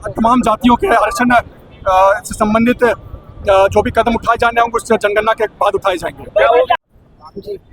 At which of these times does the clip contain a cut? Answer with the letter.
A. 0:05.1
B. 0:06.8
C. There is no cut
B